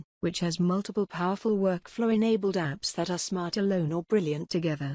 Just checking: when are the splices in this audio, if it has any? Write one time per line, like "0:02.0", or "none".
none